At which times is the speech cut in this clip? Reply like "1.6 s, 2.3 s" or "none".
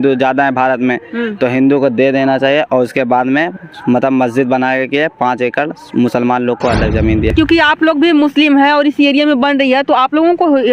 7.3 s